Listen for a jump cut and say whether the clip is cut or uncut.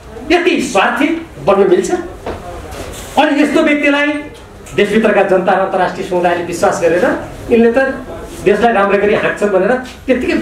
uncut